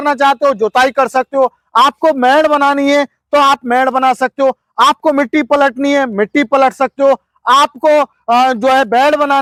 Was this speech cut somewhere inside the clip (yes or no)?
no